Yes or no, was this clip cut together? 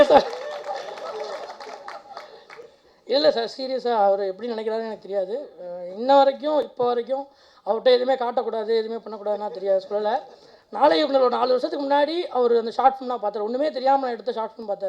no